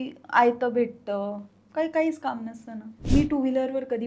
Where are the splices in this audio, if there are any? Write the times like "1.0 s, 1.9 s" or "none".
3.1 s